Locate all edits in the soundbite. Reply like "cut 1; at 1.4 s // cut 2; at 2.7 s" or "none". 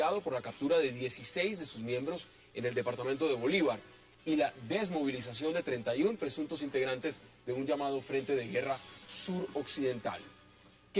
none